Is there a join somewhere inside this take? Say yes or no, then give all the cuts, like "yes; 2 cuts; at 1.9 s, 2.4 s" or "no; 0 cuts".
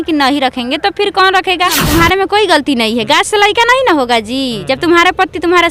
yes; 1 cut; at 1.8 s